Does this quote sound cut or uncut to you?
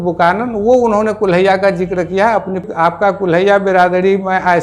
cut